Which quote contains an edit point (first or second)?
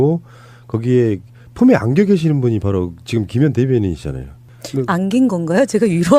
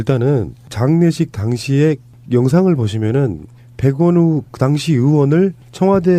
first